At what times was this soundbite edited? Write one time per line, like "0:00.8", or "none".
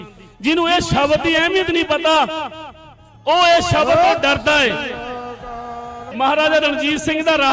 0:06.0